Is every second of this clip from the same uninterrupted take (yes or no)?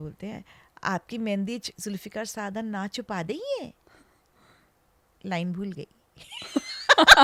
yes